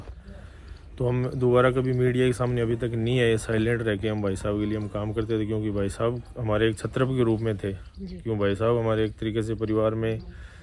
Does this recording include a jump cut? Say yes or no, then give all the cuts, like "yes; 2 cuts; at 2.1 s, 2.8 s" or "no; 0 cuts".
no; 0 cuts